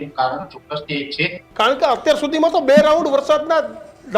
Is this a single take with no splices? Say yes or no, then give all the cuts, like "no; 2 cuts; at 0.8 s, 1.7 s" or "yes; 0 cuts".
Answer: no; 1 cut; at 1.4 s